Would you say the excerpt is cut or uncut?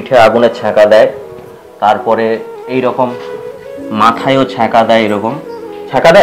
uncut